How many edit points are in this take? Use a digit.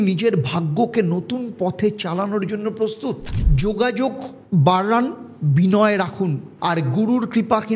1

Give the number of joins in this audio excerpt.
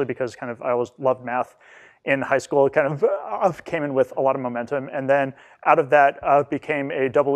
1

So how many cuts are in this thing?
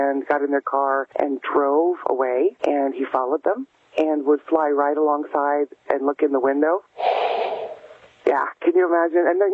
2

